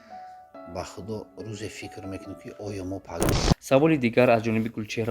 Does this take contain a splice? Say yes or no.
yes